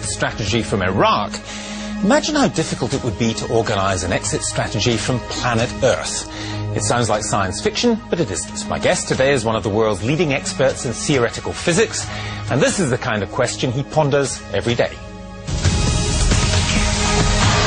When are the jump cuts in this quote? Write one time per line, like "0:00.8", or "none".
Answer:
none